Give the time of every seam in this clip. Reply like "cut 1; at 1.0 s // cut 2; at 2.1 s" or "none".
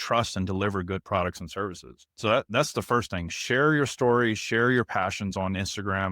cut 1; at 2.1 s